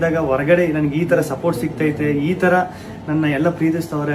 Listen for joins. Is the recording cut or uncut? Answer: uncut